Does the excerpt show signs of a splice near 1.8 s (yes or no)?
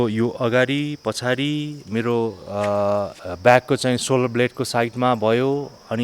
no